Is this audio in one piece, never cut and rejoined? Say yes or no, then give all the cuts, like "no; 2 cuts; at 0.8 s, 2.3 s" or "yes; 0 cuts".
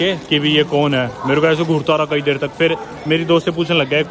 yes; 0 cuts